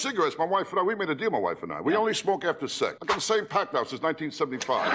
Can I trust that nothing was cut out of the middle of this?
yes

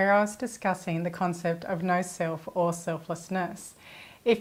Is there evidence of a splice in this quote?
no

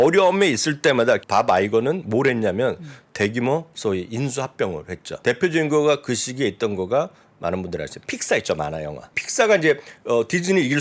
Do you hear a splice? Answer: yes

